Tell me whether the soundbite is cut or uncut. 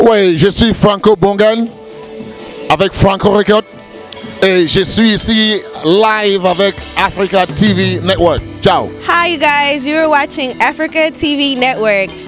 uncut